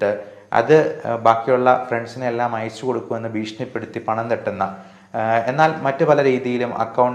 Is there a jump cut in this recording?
no; 0 cuts

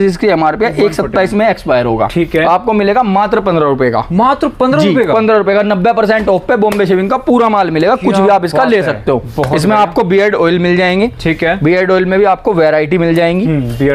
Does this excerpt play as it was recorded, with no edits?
yes; 0 cuts

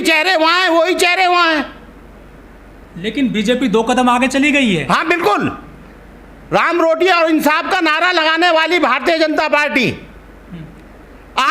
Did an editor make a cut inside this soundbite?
no; 0 cuts

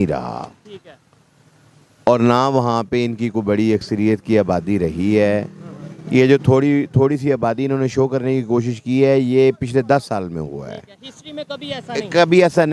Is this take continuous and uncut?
yes; 0 cuts

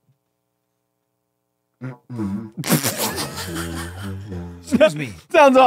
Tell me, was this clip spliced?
no; 0 cuts

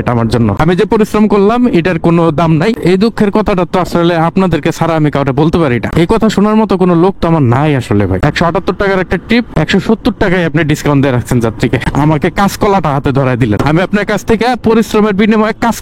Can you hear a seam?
yes; 3 cuts; at 2.8 s, 8.2 s, 9.6 s

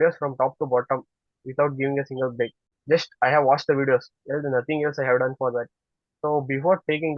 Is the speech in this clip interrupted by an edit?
no; 0 cuts

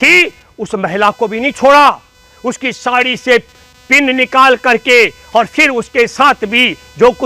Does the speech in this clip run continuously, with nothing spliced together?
yes; 0 cuts

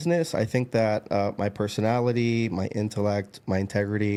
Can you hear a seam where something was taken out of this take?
no; 0 cuts

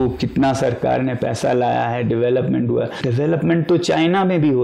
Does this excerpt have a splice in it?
yes; 1 cut; at 3.0 s

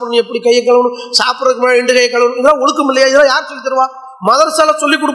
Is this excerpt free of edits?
yes; 0 cuts

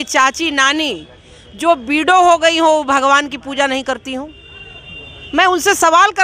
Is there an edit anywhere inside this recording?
no; 0 cuts

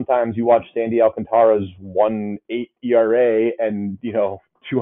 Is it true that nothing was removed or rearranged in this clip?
yes; 0 cuts

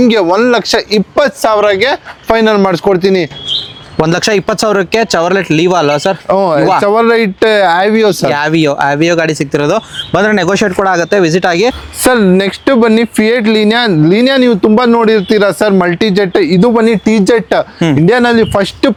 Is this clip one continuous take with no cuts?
yes; 0 cuts

